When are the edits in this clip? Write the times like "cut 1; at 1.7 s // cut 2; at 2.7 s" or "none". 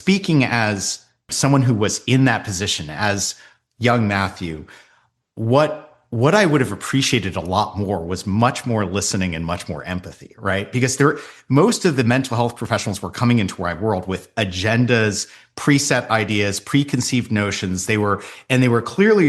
cut 1; at 1.3 s

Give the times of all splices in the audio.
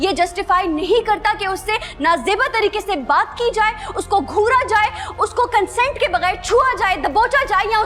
none

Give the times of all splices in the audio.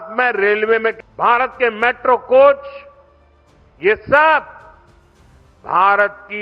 cut 1; at 1.0 s

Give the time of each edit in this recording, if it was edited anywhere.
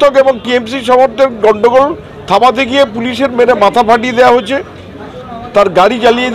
none

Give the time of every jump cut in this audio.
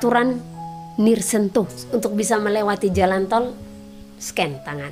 cut 1; at 1.8 s

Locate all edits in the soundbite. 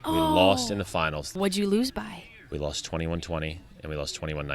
cut 1; at 1.3 s

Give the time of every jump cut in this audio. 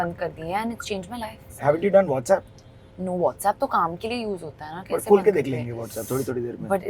cut 1; at 1.5 s

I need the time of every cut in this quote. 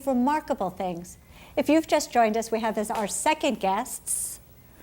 cut 1; at 3.0 s

